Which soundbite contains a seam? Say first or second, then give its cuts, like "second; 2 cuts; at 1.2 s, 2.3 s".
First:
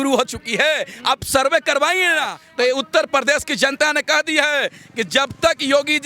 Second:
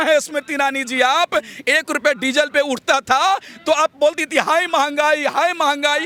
first; 1 cut; at 2.4 s